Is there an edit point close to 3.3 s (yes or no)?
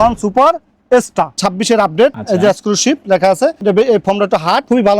no